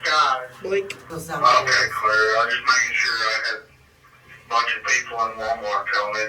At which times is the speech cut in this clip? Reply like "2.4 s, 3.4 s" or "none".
none